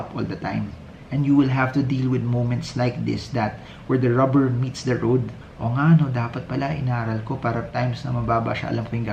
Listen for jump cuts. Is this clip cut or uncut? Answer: uncut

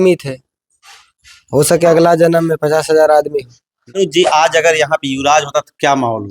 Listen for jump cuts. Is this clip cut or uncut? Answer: cut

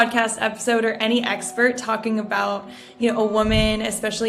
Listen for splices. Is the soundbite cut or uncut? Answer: uncut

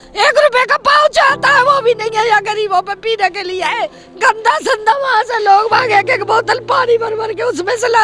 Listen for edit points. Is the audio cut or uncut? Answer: cut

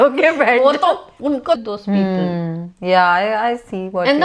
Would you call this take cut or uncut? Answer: cut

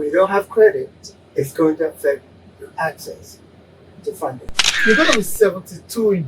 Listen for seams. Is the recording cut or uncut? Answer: cut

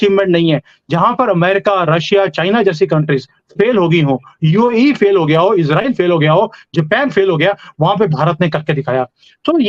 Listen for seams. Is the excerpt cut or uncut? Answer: uncut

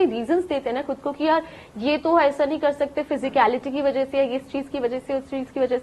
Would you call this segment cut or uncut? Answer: uncut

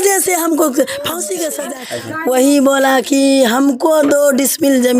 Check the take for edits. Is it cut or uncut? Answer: cut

